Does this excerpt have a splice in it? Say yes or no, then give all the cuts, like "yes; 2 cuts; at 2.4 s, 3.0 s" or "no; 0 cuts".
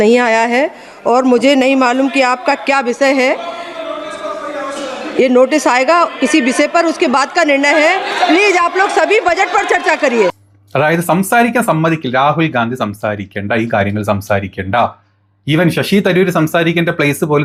no; 0 cuts